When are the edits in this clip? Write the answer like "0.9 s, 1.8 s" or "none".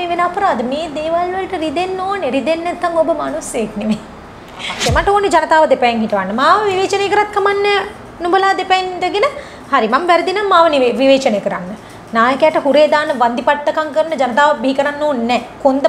4.7 s

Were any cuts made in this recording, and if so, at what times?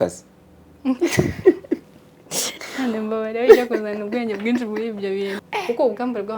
5.4 s

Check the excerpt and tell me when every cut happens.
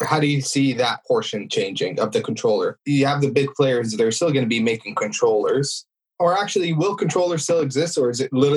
1.0 s, 2.8 s

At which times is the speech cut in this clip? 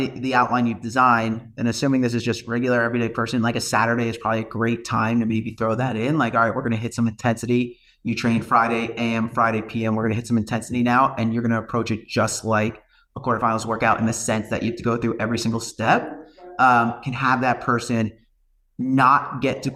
none

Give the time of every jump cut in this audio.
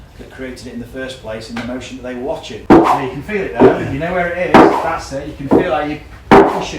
2.5 s

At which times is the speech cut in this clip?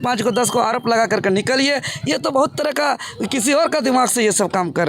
none

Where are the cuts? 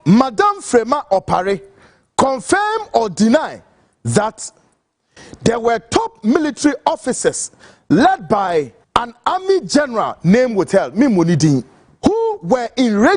8.8 s, 11.8 s

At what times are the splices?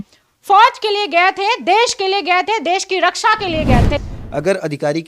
3.8 s

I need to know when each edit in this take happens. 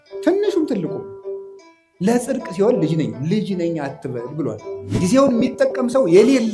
4.9 s

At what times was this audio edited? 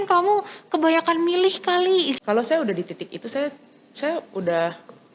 2.2 s

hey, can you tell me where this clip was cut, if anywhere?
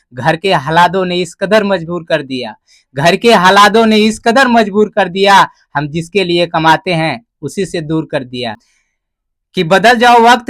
8.7 s

